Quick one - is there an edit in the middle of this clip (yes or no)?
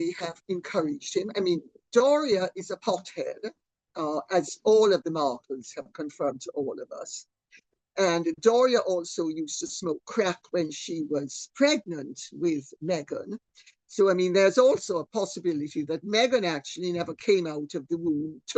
no